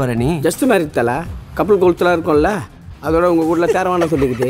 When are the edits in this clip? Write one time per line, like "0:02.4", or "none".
none